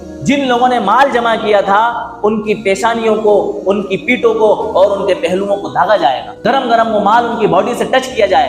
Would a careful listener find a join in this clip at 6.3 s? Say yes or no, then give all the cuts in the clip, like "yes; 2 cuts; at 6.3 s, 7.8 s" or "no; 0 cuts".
yes; 1 cut; at 6.3 s